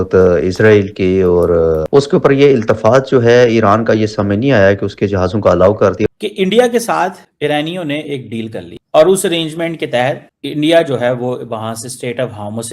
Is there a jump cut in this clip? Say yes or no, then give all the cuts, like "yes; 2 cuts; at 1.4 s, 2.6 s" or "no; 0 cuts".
yes; 2 cuts; at 1.9 s, 6.1 s